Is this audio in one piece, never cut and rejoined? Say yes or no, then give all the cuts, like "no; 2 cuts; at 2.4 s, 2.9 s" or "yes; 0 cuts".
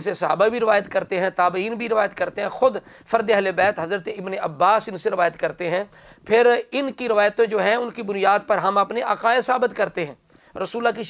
yes; 0 cuts